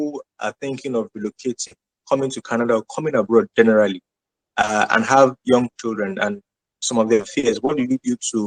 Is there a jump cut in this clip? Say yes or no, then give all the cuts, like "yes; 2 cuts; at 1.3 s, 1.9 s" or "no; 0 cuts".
no; 0 cuts